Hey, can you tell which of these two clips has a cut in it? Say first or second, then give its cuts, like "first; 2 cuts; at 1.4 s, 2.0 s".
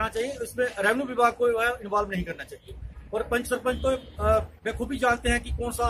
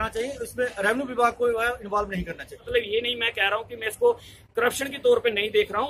second; 1 cut; at 2.7 s